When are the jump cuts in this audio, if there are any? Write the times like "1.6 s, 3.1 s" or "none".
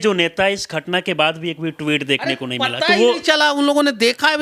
none